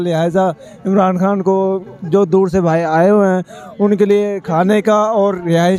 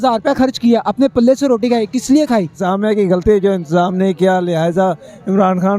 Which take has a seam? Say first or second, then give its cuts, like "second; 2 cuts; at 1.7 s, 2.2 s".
second; 1 cut; at 2.6 s